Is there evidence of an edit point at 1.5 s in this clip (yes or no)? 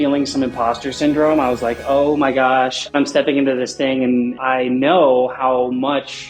no